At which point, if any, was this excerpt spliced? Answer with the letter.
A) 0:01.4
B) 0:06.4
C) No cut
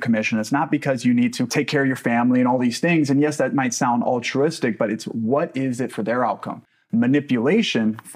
A